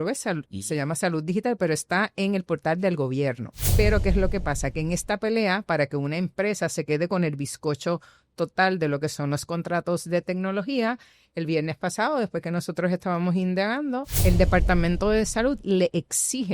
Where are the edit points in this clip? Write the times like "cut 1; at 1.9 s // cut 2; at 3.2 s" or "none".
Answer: cut 1; at 3.6 s // cut 2; at 14.1 s